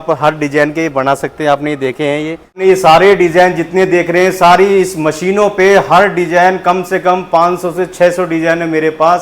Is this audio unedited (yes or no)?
no